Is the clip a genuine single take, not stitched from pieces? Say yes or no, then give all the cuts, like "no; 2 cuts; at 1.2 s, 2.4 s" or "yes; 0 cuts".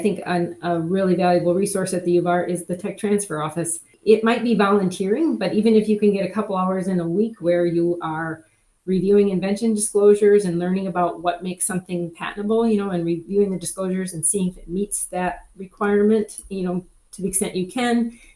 no; 1 cut; at 3.9 s